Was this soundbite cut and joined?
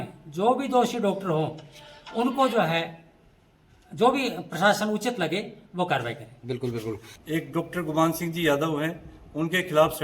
yes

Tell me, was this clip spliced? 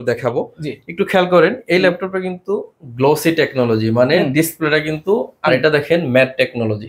yes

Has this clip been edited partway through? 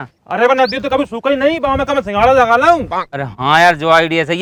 no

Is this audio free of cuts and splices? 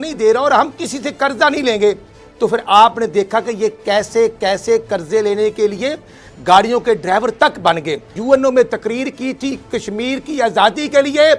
no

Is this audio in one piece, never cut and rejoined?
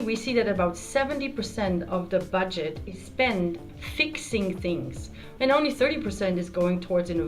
no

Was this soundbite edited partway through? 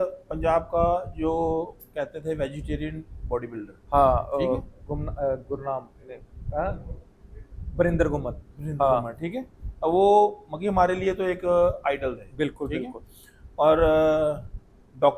no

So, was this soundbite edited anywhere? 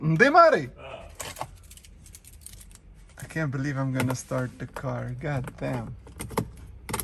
no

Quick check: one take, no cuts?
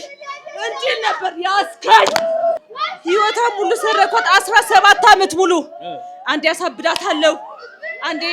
no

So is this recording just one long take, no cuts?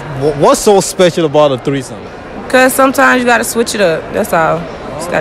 yes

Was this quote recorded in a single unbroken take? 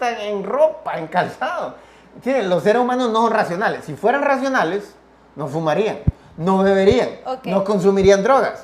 no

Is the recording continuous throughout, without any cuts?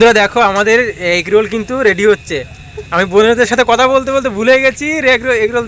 yes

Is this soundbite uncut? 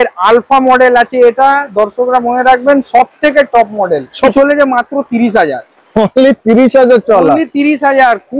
no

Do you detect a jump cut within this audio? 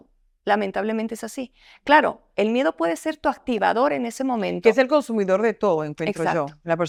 no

